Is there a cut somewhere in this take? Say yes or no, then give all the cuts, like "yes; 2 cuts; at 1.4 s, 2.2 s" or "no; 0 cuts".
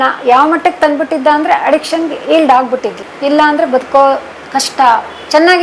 no; 0 cuts